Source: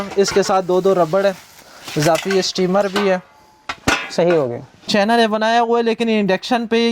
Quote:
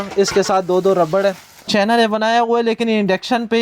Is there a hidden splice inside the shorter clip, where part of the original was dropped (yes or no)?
yes